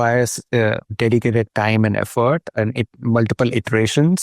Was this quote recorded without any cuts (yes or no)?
no